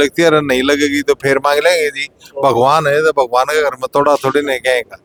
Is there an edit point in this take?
no; 0 cuts

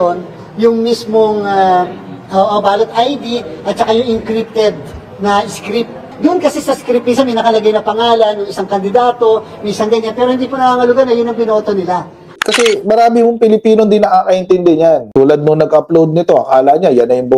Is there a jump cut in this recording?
yes; 3 cuts; at 6.1 s, 12.4 s, 15.1 s

